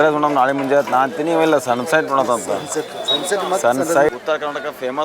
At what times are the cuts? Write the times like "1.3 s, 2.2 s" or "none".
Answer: 4.1 s